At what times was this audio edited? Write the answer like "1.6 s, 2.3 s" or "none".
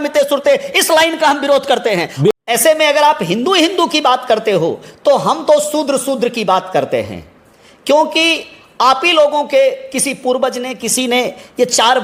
2.1 s